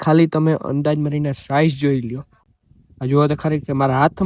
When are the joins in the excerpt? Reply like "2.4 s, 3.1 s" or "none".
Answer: 2.2 s